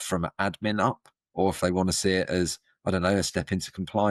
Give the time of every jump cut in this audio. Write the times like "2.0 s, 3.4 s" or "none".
none